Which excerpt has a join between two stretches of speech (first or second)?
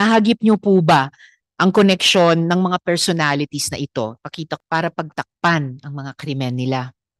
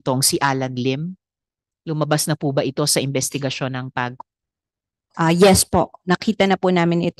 first